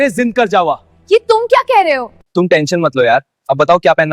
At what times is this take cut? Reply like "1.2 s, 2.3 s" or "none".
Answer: 2.2 s